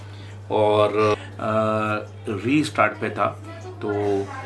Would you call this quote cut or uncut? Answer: cut